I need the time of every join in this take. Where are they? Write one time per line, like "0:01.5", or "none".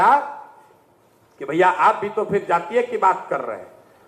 none